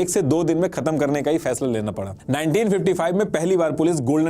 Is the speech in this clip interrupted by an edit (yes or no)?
yes